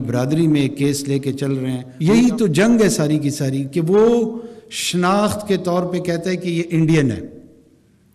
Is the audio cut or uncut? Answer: cut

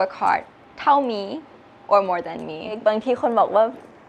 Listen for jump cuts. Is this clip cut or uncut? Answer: cut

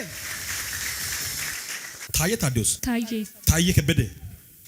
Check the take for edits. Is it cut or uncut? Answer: cut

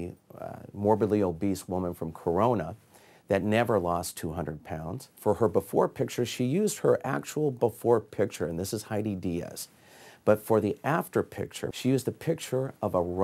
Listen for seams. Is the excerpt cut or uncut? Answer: cut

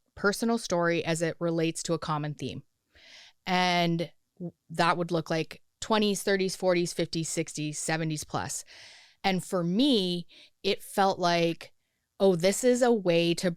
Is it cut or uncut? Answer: uncut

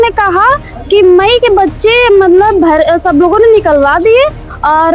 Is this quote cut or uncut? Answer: uncut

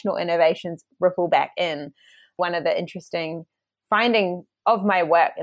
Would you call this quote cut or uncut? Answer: cut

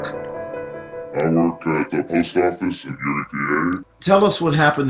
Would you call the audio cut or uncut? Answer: uncut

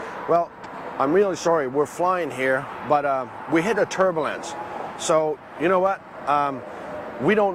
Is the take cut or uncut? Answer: uncut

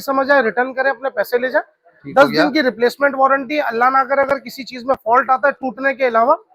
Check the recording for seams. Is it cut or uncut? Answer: uncut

